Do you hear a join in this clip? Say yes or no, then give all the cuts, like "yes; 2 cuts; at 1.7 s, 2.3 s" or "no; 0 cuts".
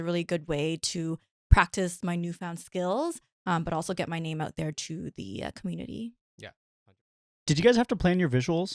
yes; 1 cut; at 6.8 s